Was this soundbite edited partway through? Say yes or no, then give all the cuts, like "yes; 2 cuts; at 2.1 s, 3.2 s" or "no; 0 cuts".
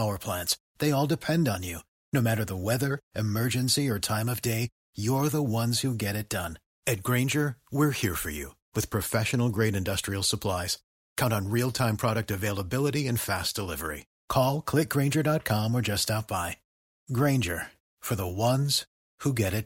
no; 0 cuts